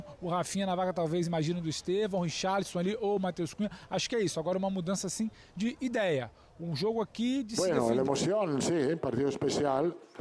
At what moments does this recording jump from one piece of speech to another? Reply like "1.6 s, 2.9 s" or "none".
7.5 s